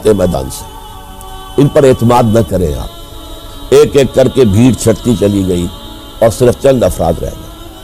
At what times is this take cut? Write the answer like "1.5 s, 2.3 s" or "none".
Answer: 3.5 s